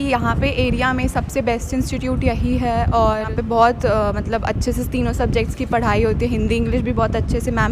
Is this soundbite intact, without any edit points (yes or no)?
no